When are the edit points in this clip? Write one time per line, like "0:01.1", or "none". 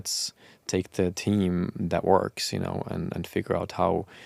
none